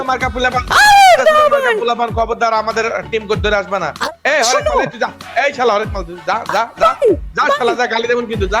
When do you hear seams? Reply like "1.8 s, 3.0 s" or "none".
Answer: none